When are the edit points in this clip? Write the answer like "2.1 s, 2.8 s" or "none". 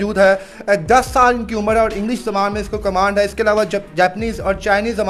none

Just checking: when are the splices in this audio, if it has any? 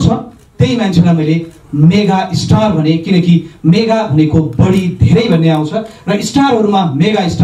none

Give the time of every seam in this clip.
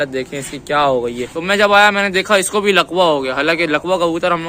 1.3 s

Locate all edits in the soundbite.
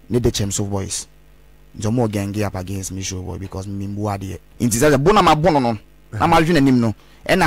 4.4 s

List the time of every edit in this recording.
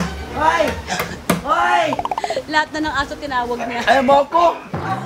none

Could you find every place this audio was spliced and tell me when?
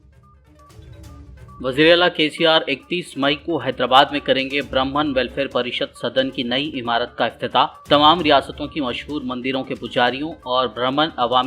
1.0 s

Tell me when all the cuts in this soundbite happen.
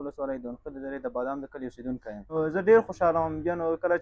2.3 s

